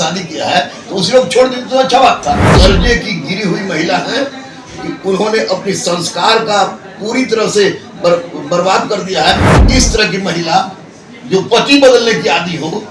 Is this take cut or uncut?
cut